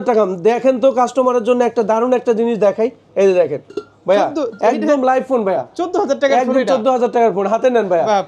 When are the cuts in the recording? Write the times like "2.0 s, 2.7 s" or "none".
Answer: none